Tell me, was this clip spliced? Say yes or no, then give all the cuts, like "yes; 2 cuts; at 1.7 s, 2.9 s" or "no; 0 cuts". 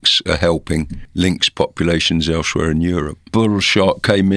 yes; 2 cuts; at 1.0 s, 3.3 s